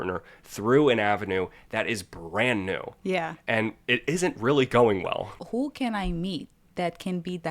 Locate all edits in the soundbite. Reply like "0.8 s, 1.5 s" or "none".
5.3 s